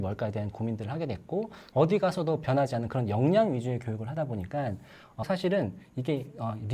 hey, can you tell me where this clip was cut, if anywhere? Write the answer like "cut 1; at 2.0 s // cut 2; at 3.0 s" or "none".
cut 1; at 1.6 s // cut 2; at 5.2 s

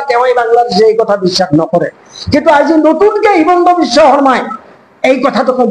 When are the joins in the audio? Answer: none

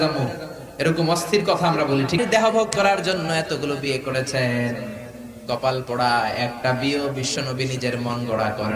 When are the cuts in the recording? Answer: cut 1; at 2.2 s

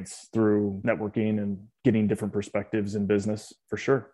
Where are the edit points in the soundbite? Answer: none

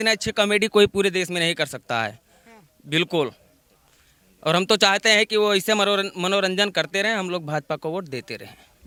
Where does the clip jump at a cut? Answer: none

